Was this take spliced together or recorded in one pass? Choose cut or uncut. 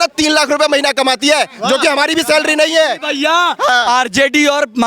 uncut